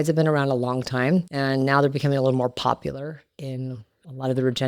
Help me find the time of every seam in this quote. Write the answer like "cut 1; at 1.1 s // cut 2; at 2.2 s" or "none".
cut 1; at 1.3 s